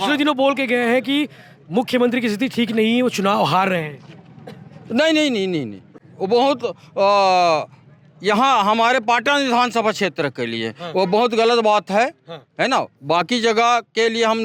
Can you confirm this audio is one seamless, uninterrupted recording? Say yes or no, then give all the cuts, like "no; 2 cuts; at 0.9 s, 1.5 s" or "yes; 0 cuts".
yes; 0 cuts